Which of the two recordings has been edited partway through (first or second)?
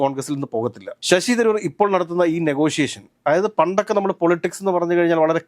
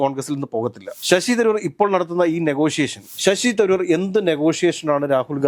second